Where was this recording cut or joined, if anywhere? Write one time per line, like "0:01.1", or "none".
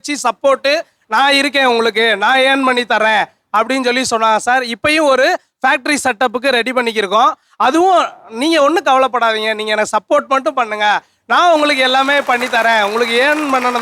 none

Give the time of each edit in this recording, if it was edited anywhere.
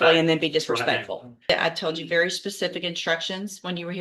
0:01.5

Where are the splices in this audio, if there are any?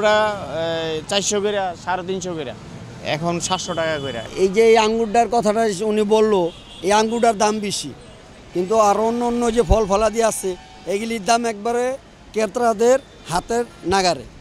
none

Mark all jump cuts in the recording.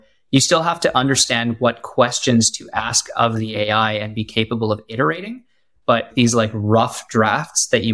0:06.1

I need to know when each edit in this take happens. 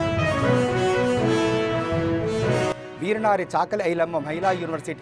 0:02.7

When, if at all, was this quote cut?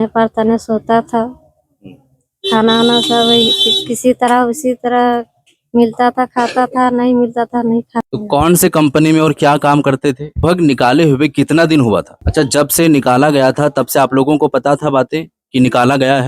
0:08.1
0:10.4
0:12.2

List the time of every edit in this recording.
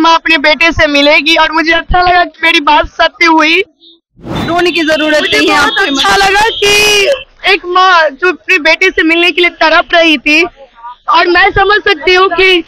0:04.2

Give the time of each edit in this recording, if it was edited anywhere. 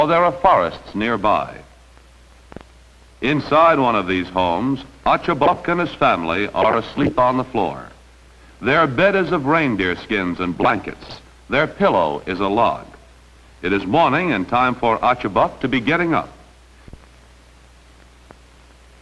0:10.2

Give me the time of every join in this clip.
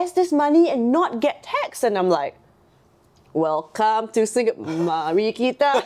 none

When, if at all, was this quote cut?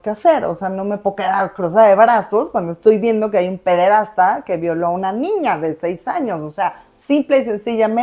none

